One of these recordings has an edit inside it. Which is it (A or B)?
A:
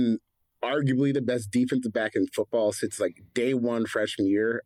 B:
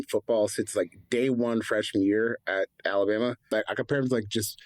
B